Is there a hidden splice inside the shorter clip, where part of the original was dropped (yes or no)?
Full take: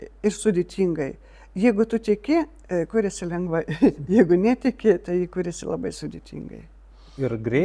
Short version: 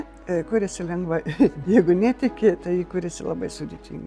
no